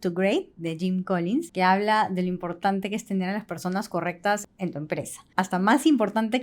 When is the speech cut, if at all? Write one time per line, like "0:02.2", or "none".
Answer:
0:01.5
0:04.4